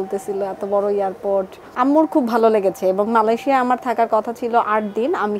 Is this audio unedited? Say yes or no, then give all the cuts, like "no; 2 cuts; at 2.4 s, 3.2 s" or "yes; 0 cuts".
no; 1 cut; at 1.6 s